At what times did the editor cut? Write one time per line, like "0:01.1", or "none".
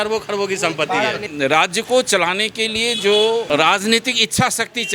0:01.2
0:03.5